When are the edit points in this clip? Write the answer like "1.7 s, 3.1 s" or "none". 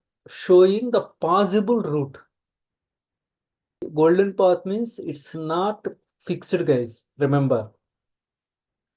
3.9 s